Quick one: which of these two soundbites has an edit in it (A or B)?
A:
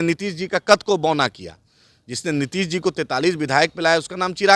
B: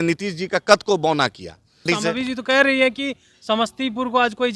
B